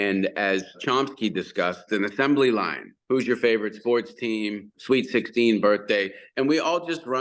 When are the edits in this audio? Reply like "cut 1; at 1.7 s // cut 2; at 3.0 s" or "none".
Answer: cut 1; at 0.8 s // cut 2; at 1.8 s // cut 3; at 2.9 s // cut 4; at 4.7 s